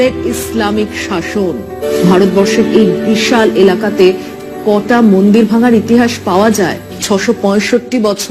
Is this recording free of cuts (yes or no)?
no